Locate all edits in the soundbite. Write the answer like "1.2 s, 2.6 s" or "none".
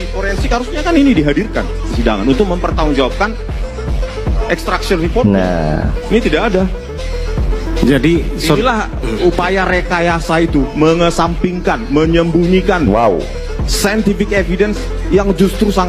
none